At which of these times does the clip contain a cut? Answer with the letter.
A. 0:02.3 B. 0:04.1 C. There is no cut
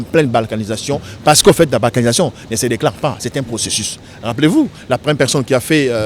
C